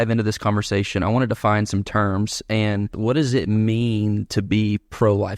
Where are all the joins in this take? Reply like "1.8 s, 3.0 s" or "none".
2.9 s